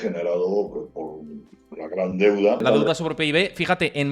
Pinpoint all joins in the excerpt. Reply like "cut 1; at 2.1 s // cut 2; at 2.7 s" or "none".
cut 1; at 2.6 s